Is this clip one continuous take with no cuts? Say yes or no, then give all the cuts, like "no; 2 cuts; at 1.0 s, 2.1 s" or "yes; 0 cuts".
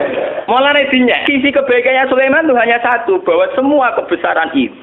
no; 1 cut; at 1.2 s